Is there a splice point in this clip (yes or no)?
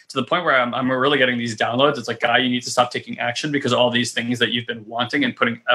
no